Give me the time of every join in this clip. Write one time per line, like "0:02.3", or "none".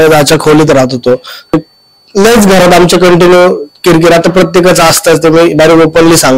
0:01.5